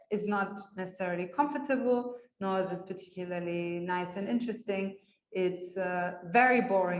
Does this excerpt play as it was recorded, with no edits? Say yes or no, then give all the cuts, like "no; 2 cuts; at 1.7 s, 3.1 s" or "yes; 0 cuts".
yes; 0 cuts